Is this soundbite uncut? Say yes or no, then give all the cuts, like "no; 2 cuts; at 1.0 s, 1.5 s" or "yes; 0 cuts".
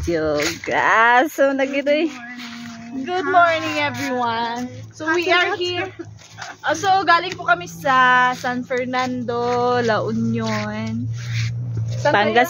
yes; 0 cuts